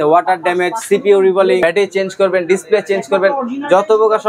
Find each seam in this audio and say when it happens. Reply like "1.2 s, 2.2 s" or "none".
1.6 s